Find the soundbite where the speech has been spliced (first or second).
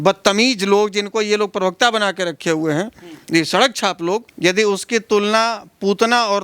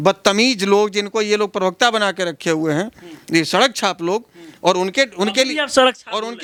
first